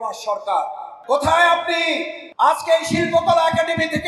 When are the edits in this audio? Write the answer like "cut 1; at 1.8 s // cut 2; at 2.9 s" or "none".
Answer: cut 1; at 0.9 s // cut 2; at 2.2 s